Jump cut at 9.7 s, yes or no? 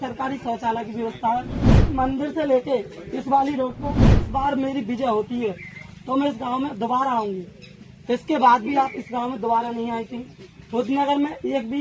no